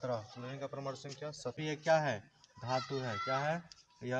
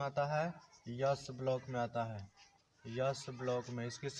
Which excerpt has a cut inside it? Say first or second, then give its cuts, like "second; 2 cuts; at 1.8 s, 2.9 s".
first; 1 cut; at 1.6 s